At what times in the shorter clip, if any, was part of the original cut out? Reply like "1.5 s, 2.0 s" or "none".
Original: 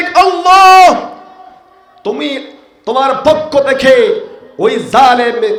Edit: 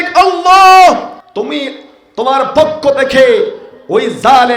1.2 s